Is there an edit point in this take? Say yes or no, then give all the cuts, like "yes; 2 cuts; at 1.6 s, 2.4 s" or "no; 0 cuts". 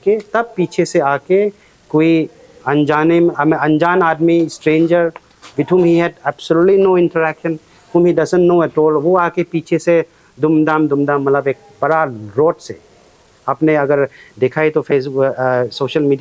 no; 0 cuts